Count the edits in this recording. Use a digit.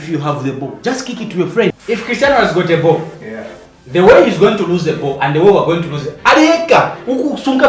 1